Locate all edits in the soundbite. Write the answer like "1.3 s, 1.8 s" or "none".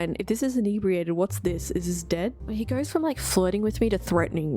2.4 s